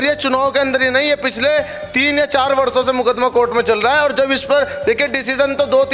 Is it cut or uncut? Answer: uncut